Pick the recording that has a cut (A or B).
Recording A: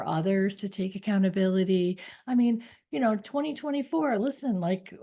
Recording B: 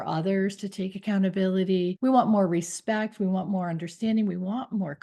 B